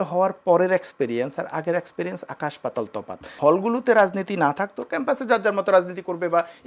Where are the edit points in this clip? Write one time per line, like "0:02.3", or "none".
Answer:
0:03.3